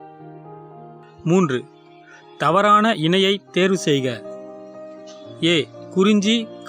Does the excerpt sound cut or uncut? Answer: cut